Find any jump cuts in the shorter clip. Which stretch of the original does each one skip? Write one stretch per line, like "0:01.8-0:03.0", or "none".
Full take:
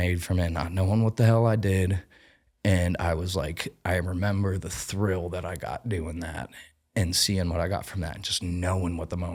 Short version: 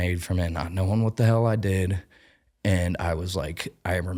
none